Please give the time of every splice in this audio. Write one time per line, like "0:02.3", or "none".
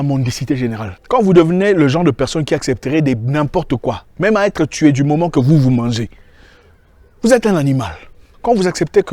0:00.9